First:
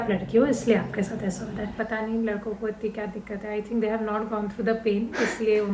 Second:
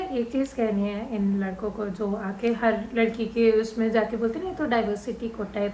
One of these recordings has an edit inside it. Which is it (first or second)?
first